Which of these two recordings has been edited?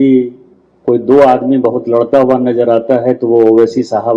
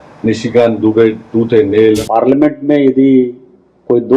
second; 1 cut; at 2.0 s

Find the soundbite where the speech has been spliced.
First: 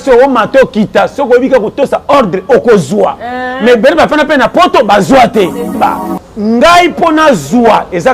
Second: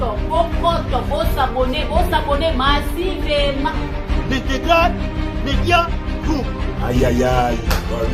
first; 1 cut; at 5.8 s

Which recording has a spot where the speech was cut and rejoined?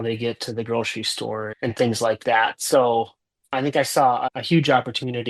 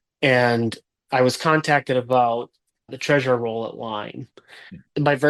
first; 2 cuts; at 1.5 s, 4.3 s

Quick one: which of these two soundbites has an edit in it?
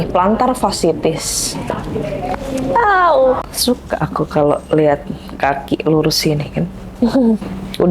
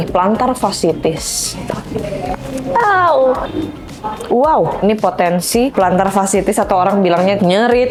first; 1 cut; at 3.5 s

